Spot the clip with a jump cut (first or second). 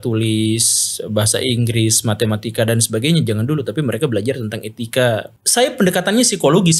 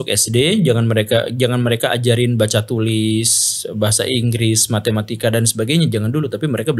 first